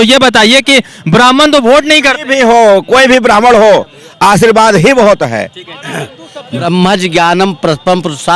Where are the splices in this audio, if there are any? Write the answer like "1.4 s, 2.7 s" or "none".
6.6 s